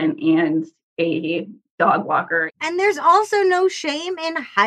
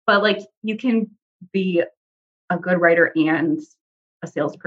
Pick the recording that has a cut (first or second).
first